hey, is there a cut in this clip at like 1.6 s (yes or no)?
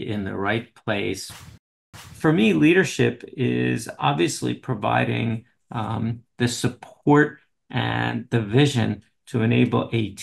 yes